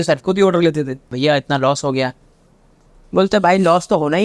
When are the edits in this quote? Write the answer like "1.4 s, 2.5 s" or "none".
1.1 s